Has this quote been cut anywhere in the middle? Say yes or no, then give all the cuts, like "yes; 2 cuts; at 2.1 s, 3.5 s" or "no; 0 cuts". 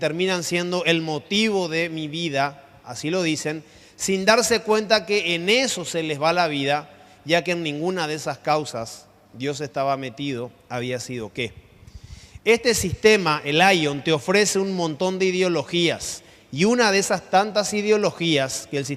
yes; 1 cut; at 8.1 s